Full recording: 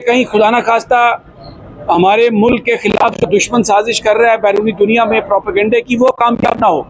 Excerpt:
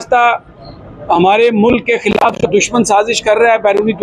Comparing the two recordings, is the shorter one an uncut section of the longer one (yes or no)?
yes